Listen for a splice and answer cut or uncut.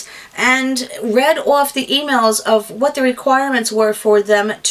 uncut